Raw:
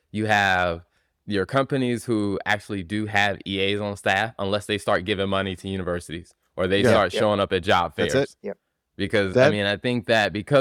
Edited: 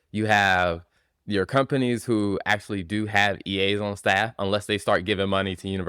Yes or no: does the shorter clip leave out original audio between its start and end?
no